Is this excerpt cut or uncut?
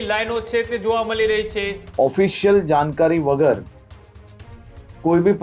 cut